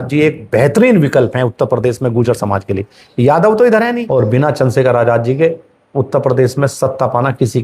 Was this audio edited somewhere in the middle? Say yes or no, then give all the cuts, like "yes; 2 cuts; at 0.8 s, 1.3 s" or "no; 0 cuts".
yes; 1 cut; at 4.0 s